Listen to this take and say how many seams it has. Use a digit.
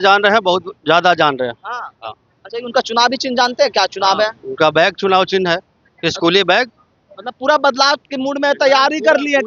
0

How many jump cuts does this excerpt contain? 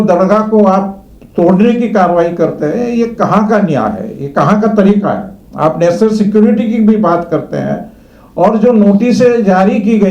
0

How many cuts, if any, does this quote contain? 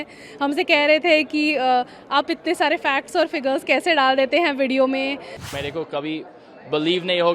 1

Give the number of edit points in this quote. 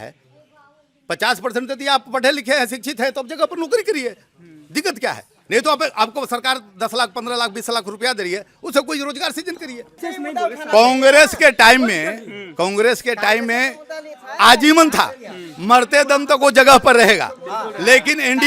1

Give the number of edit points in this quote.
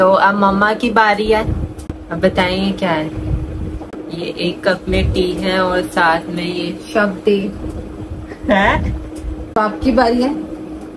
2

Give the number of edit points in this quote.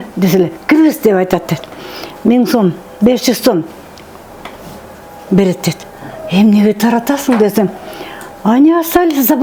0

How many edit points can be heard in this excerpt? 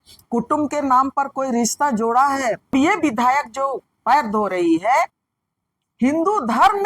1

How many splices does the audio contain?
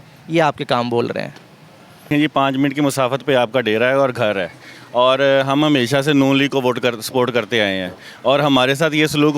1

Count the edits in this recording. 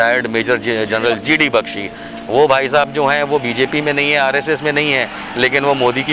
0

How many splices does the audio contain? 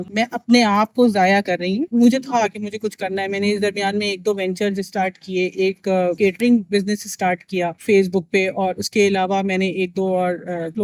0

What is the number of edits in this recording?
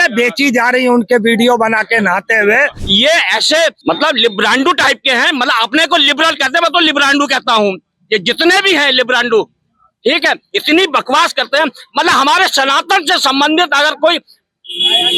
2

